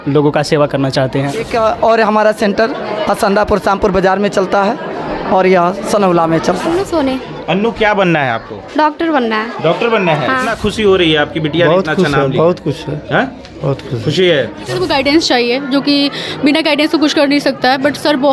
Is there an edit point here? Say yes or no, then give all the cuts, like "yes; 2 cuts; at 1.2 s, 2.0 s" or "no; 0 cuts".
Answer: yes; 4 cuts; at 1.5 s, 6.8 s, 10.5 s, 14.8 s